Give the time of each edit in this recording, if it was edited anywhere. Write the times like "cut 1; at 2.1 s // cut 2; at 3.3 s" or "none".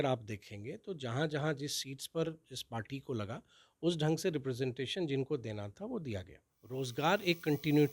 cut 1; at 6.9 s

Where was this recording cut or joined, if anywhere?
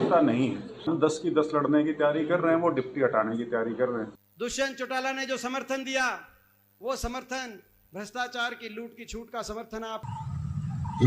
cut 1; at 0.9 s // cut 2; at 4.2 s // cut 3; at 10.0 s

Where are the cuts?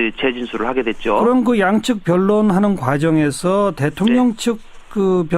cut 1; at 0.9 s

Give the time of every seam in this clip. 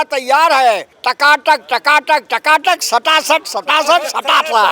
cut 1; at 0.9 s

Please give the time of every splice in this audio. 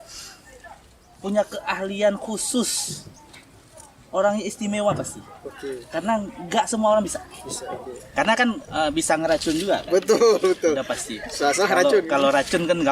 cut 1; at 8.0 s

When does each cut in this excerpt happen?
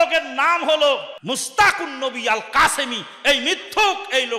cut 1; at 1.2 s

